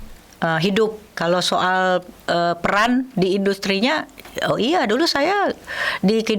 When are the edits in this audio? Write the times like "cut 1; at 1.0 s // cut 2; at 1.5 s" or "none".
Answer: cut 1; at 1.1 s